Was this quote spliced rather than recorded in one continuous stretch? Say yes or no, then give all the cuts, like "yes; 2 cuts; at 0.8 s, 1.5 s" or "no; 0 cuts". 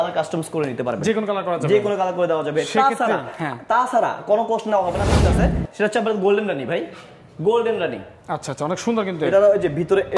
yes; 2 cuts; at 5.2 s, 9.1 s